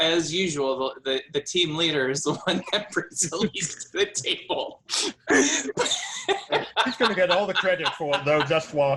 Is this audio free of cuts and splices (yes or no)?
yes